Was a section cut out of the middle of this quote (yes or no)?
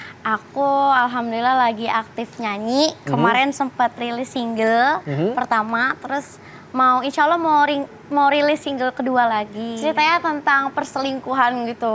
yes